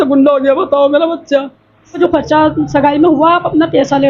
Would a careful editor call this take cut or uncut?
cut